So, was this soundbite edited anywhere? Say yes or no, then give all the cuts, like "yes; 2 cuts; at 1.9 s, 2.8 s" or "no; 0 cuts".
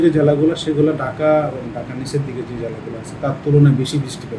no; 0 cuts